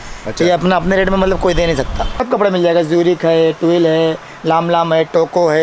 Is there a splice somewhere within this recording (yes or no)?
yes